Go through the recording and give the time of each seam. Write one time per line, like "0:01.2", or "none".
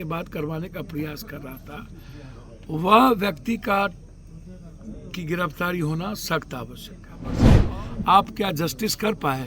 0:07.6